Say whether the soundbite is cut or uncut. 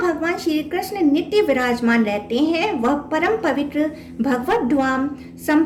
uncut